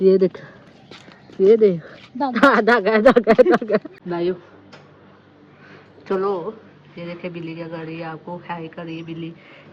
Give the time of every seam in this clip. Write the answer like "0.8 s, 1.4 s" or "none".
3.9 s